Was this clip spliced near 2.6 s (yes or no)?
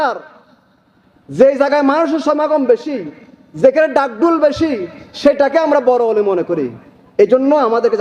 no